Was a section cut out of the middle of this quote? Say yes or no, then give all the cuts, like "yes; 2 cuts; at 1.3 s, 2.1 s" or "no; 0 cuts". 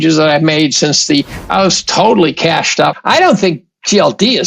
yes; 1 cut; at 3.0 s